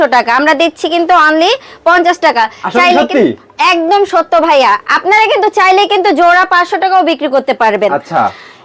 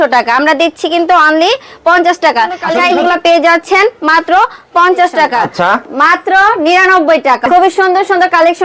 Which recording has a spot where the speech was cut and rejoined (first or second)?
second